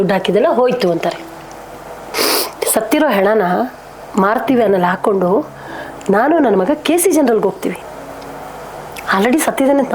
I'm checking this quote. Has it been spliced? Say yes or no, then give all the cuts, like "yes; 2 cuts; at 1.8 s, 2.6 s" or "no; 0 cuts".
yes; 2 cuts; at 2.0 s, 7.8 s